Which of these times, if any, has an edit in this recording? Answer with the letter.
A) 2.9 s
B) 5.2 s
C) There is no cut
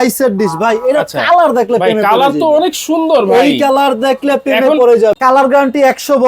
B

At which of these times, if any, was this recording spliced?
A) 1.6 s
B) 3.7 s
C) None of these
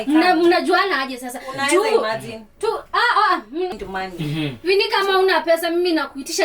B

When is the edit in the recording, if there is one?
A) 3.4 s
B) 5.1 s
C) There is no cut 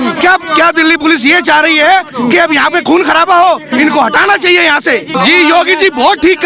B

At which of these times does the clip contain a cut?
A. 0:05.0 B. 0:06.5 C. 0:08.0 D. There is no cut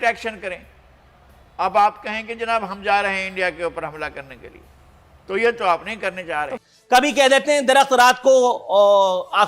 B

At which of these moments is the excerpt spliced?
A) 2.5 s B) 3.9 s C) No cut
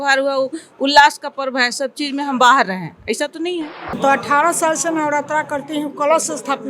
B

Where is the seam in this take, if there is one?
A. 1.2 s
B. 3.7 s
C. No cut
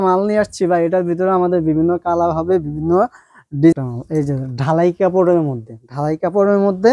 B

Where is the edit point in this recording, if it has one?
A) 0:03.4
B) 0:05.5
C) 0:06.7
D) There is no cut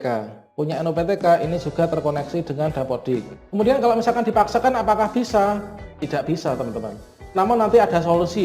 A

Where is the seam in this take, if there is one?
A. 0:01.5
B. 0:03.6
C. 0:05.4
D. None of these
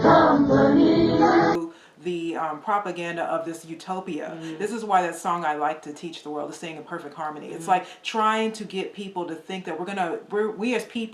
A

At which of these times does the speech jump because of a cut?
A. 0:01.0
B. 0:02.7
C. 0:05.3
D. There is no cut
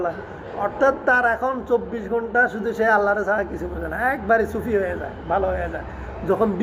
D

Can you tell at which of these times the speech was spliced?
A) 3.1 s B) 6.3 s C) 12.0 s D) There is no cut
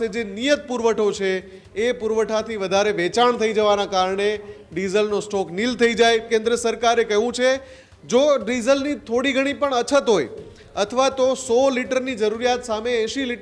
B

